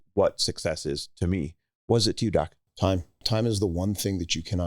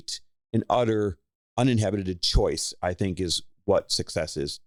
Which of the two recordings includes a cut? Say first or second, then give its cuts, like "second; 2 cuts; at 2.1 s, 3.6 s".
first; 1 cut; at 3.2 s